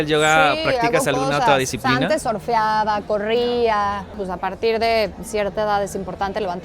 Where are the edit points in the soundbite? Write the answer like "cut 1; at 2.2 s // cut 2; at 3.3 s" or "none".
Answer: cut 1; at 4.2 s